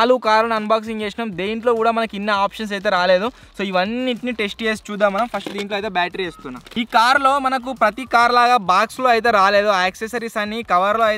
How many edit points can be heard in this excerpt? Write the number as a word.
zero